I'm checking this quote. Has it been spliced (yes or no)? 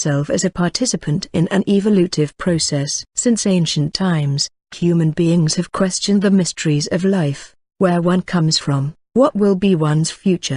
yes